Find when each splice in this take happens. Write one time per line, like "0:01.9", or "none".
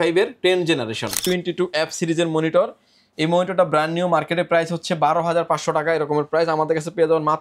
0:01.2